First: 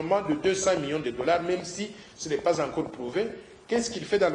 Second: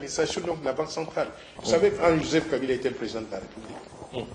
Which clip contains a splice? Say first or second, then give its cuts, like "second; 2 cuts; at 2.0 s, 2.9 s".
second; 1 cut; at 1.6 s